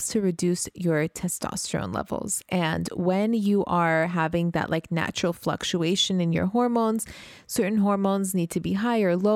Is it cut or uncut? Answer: uncut